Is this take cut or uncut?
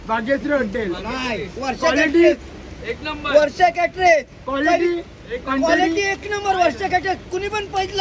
uncut